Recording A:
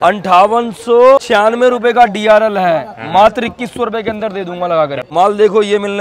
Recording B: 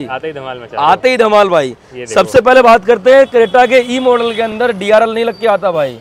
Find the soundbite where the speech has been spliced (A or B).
A